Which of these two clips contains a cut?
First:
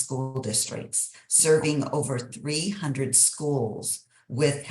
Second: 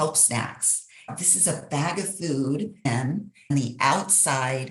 second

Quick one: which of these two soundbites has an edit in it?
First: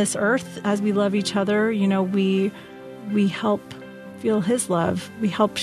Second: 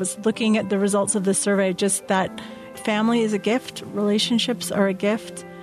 second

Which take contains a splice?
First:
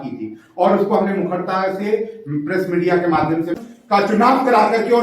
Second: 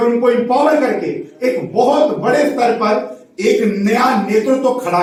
first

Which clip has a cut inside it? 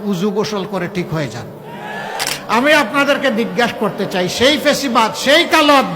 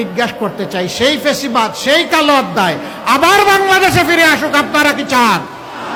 first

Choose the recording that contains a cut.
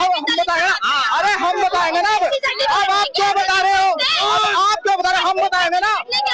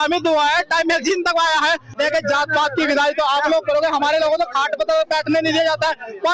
second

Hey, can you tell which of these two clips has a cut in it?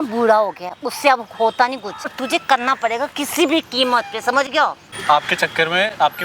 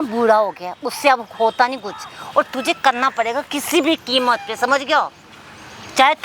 first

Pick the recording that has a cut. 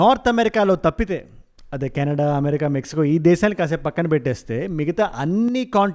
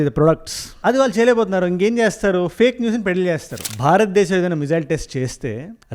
second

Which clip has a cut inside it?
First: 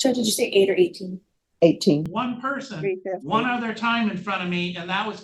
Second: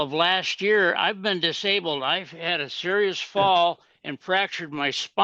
first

